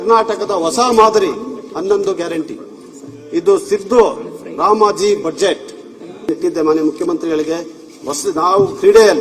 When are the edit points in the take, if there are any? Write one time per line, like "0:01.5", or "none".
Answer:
0:06.3